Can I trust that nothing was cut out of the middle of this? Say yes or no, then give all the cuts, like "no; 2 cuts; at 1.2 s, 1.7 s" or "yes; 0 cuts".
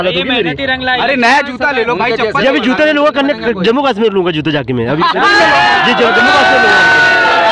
yes; 0 cuts